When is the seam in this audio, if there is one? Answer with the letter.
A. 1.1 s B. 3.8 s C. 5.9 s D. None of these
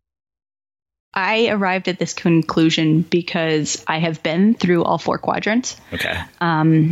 A